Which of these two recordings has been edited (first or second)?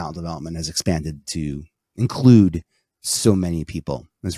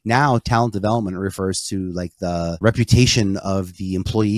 second